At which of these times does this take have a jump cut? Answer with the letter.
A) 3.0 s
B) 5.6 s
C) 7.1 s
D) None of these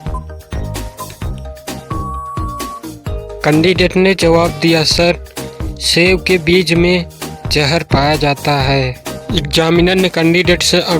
A